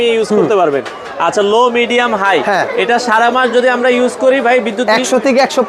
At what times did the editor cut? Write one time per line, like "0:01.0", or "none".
none